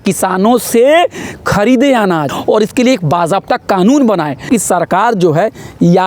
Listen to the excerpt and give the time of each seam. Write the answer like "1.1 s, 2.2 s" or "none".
2.3 s, 4.4 s